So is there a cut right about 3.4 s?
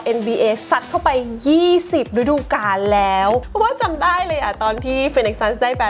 yes; 1 cut; at 3.4 s

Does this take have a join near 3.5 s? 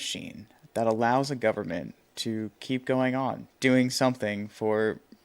yes; 1 cut; at 3.5 s

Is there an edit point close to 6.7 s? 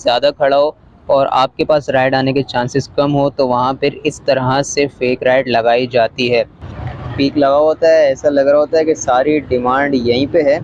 yes; 1 cut; at 6.7 s

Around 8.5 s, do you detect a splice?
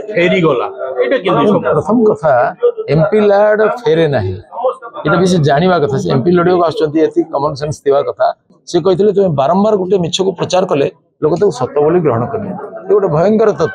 yes; 1 cut; at 8.5 s

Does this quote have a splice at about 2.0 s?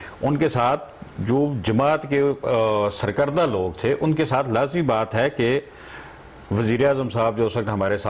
no; 0 cuts

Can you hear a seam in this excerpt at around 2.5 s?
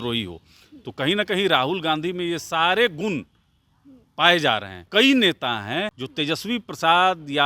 no; 1 cut; at 4.9 s

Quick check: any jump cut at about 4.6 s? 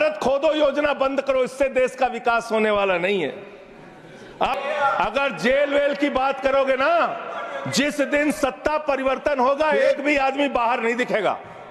yes; 1 cut; at 4.6 s

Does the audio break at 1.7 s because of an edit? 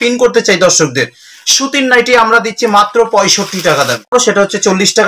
no; 1 cut; at 4.1 s

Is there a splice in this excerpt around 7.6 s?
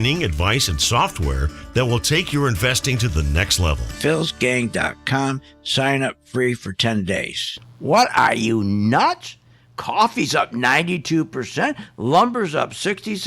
yes; 1 cut; at 7.6 s

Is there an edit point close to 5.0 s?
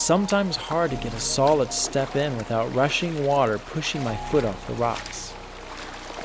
yes; 1 cut; at 5.0 s

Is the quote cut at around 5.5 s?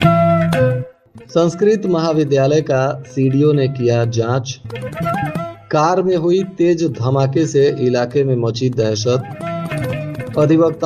no; 1 cut; at 0.9 s

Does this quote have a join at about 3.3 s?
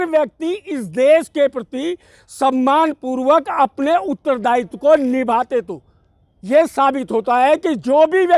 no; 0 cuts

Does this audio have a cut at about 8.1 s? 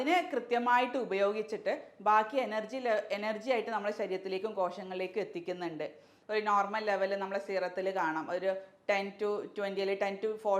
no; 1 cut; at 6.1 s

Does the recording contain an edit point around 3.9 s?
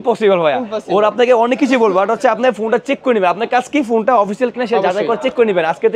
no; 0 cuts

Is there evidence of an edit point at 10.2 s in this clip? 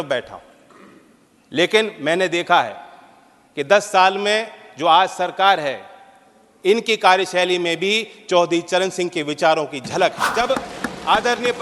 yes; 1 cut; at 10.2 s

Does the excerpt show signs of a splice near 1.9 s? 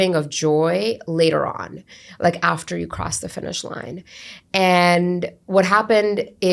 no; 0 cuts

